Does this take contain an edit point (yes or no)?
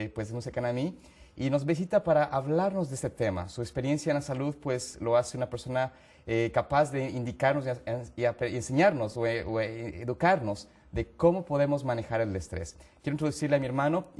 yes